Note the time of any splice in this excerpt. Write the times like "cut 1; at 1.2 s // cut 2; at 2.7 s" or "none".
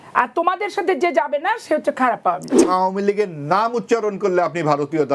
cut 1; at 2.6 s